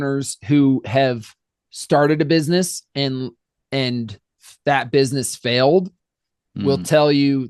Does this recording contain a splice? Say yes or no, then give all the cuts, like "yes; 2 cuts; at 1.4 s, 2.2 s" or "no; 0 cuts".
no; 0 cuts